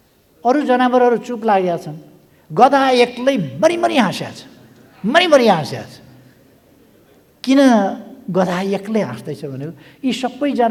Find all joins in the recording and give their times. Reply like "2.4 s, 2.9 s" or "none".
none